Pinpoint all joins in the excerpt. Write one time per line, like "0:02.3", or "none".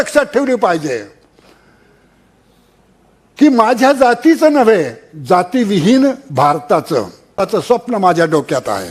0:07.6